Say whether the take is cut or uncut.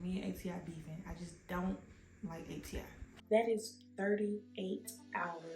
cut